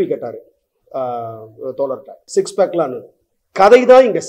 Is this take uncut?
no; 1 cut; at 2.2 s

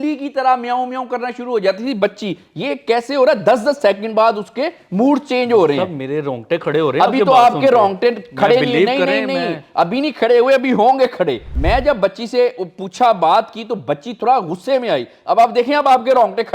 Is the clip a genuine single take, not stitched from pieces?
no; 1 cut; at 11.4 s

